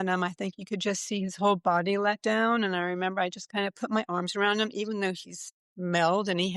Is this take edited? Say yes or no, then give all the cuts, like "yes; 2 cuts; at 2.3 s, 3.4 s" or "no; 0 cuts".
no; 0 cuts